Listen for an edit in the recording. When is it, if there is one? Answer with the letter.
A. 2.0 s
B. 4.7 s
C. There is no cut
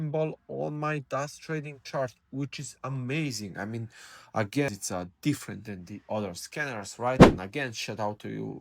B